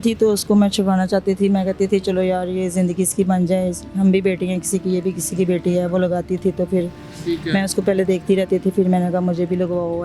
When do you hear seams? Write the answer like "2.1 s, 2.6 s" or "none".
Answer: none